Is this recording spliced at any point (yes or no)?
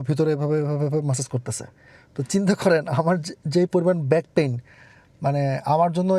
no